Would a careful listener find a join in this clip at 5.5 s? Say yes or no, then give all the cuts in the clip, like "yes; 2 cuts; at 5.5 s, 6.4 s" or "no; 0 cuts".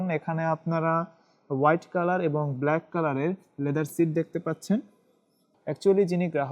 yes; 1 cut; at 5.5 s